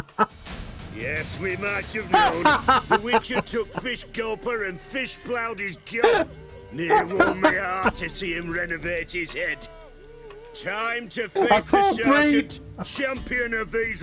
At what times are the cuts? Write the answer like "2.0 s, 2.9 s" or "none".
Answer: none